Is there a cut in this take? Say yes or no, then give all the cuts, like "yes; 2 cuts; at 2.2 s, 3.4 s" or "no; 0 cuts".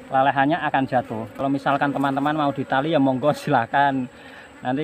yes; 1 cut; at 1.4 s